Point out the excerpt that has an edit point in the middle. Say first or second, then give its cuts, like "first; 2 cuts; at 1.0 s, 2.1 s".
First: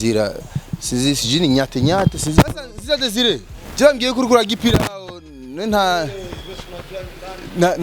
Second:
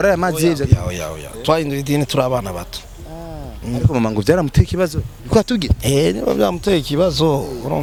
first; 1 cut; at 2.6 s